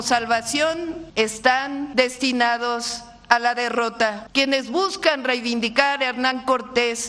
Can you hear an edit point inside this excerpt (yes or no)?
yes